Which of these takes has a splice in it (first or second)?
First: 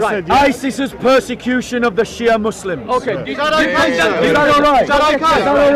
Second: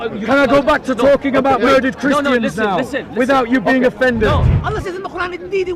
second